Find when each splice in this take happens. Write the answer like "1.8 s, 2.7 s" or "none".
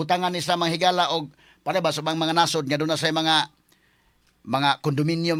none